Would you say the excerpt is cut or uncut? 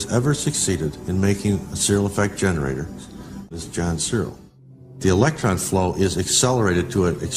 cut